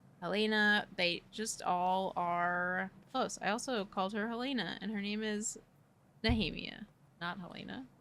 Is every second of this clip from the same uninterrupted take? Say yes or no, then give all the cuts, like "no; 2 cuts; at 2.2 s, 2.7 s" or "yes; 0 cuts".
no; 2 cuts; at 3.0 s, 7.0 s